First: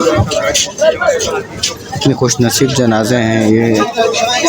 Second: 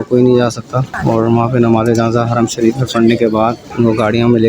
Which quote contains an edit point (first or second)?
second